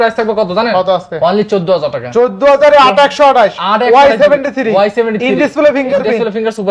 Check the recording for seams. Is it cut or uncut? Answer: uncut